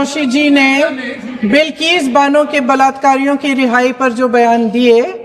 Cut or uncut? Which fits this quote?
uncut